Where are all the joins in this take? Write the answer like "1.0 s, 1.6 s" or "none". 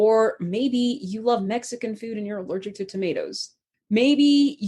3.7 s